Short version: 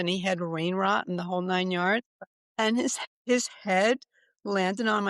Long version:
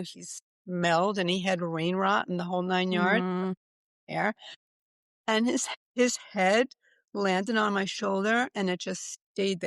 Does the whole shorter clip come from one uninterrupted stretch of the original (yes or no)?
no